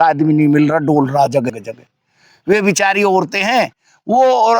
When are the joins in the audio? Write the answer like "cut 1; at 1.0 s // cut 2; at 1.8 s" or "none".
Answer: cut 1; at 1.5 s